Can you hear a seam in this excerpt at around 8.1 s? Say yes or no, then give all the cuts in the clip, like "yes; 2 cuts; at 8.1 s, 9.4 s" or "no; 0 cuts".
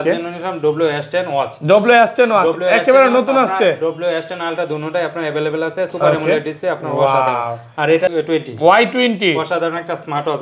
yes; 1 cut; at 8.1 s